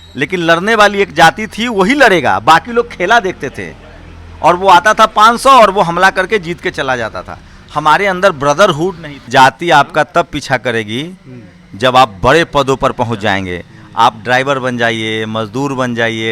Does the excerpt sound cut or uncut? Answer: cut